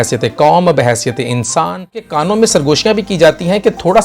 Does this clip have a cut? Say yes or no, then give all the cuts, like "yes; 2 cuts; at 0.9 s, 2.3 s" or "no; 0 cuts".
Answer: yes; 1 cut; at 2.2 s